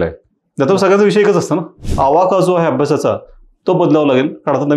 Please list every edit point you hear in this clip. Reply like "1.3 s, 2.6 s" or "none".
1.8 s